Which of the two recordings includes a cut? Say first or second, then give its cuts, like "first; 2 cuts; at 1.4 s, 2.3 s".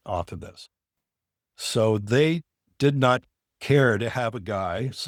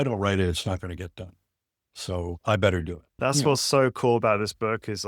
second; 1 cut; at 3.2 s